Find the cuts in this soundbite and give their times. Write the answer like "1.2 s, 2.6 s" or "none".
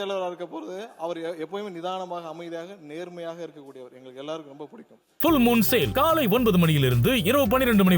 5.1 s

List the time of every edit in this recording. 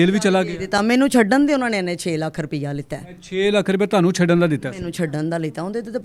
none

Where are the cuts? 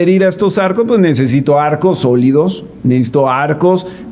none

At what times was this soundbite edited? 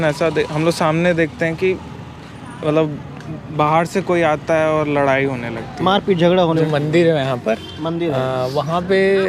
6.6 s

